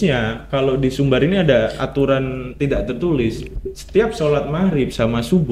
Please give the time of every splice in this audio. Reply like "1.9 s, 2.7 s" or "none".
none